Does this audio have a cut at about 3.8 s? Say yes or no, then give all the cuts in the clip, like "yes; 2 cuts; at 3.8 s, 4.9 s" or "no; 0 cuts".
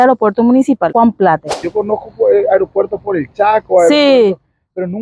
no; 2 cuts; at 0.9 s, 1.6 s